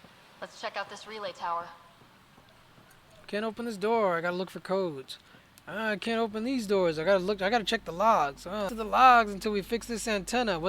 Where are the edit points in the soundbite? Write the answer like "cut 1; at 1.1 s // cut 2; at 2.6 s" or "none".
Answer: cut 1; at 8.7 s